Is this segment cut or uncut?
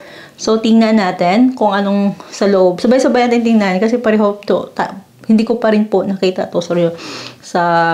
uncut